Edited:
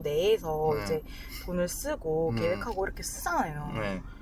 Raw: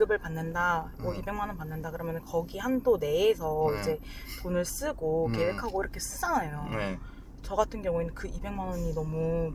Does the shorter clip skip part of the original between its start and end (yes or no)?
no